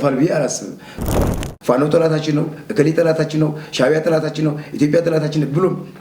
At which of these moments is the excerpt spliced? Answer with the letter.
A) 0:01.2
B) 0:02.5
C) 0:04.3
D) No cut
A